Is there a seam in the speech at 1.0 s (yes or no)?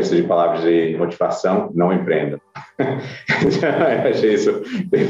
yes